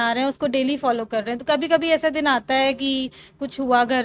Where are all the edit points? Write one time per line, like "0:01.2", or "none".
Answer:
none